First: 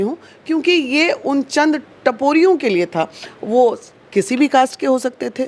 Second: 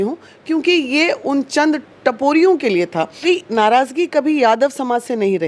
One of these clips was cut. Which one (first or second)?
second